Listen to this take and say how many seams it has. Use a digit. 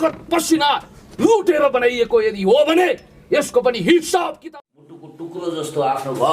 1